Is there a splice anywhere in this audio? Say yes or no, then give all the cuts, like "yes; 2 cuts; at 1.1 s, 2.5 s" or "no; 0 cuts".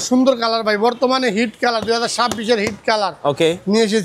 no; 0 cuts